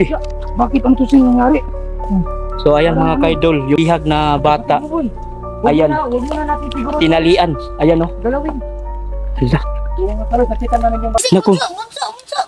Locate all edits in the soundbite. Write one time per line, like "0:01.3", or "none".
0:11.2